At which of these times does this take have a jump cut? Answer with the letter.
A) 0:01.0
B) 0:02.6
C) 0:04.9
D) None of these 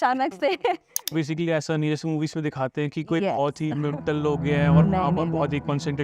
A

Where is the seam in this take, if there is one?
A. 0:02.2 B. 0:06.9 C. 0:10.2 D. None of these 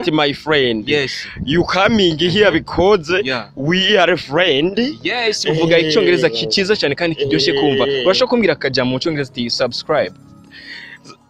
D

